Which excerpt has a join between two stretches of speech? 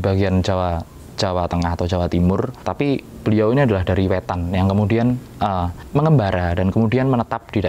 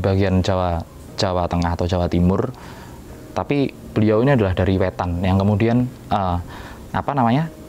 first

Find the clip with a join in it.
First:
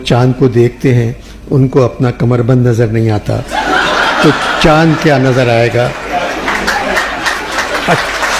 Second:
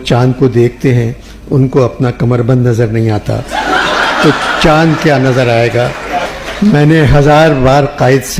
second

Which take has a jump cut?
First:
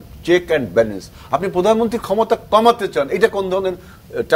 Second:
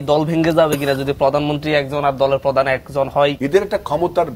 second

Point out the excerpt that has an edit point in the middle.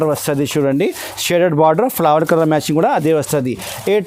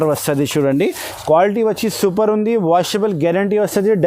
second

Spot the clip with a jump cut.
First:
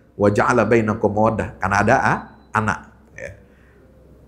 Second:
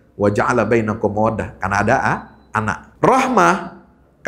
second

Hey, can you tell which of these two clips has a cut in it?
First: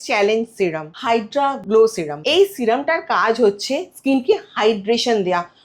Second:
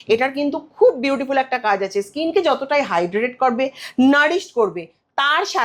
first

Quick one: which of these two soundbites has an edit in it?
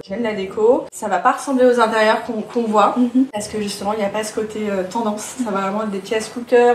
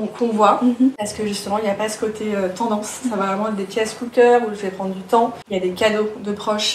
first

